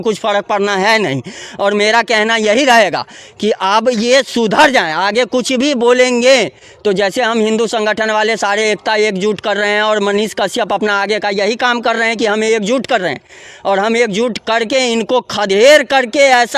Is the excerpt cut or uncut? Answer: uncut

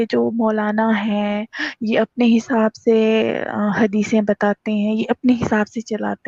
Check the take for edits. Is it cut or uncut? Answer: uncut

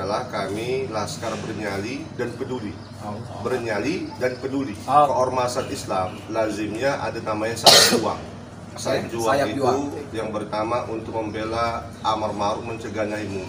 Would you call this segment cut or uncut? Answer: cut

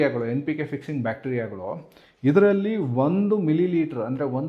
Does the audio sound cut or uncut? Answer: uncut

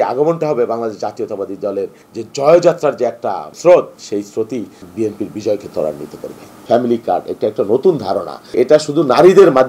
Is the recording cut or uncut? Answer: cut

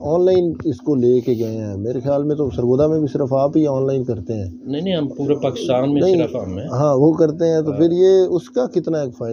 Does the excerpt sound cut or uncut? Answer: uncut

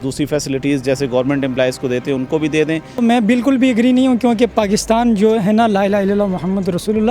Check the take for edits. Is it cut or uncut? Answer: cut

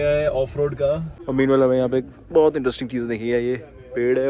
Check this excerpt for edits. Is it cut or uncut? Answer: cut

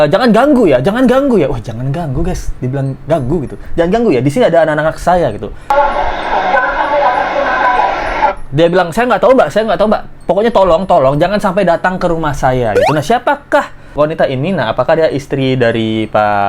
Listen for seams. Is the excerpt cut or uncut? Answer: uncut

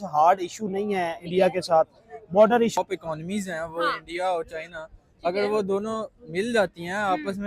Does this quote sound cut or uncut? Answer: cut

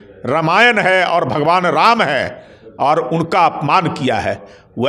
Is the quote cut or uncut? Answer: uncut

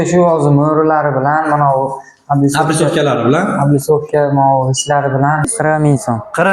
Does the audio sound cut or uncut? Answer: cut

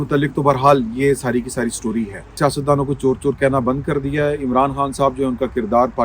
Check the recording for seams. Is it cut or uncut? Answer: cut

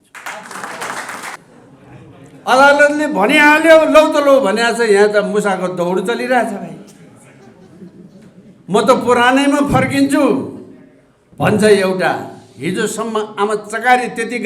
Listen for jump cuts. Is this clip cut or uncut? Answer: cut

